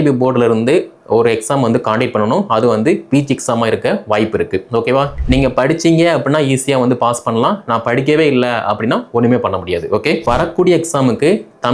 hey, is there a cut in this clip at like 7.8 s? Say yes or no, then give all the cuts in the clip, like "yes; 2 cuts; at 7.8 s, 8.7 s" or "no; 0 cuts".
no; 2 cuts; at 5.1 s, 10.2 s